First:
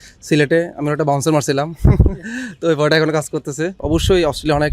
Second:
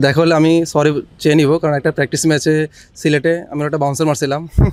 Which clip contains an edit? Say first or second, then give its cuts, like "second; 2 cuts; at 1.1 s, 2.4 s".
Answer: first; 1 cut; at 3.8 s